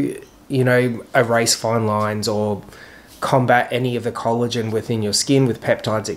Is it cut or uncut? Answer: uncut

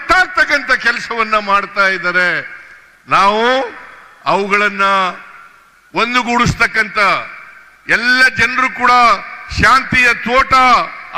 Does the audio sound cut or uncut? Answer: uncut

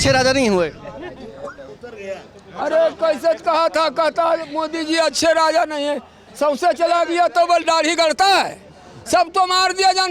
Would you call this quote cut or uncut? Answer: uncut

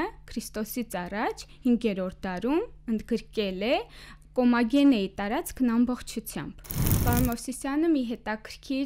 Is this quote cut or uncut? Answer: cut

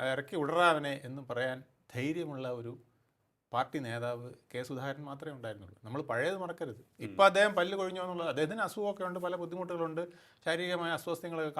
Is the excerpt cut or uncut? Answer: uncut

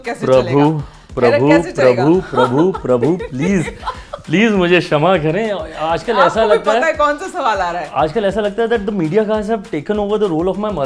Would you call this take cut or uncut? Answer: uncut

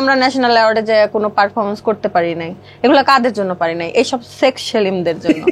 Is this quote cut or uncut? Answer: uncut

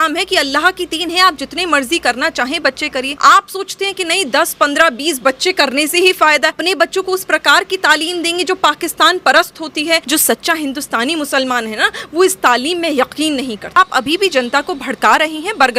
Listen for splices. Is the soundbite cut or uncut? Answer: cut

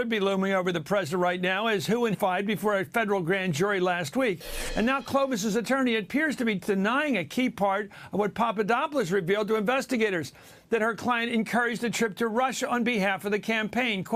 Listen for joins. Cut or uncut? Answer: uncut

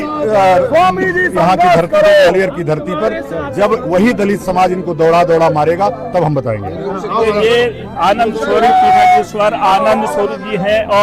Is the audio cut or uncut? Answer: uncut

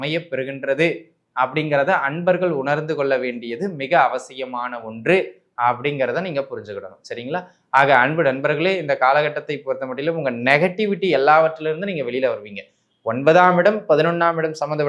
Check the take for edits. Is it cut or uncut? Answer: uncut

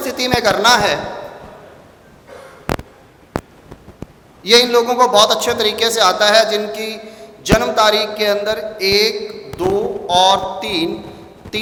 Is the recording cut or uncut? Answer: uncut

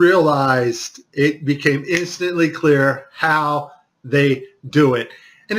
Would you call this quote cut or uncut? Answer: cut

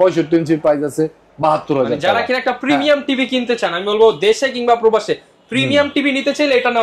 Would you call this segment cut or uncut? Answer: uncut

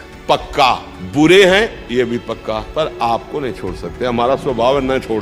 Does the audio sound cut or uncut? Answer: cut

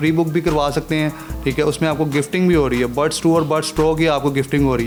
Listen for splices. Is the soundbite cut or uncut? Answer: uncut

